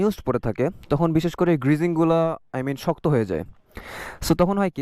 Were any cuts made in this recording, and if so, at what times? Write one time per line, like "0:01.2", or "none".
none

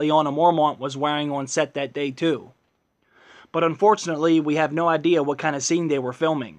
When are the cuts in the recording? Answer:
0:02.4

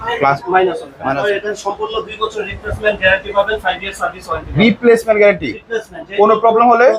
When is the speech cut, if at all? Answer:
0:01.1

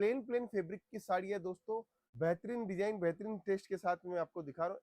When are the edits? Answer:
0:02.0

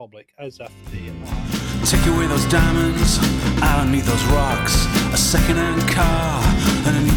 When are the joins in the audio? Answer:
0:01.4

